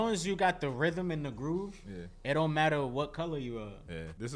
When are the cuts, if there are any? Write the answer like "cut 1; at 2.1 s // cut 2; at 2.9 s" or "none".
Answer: none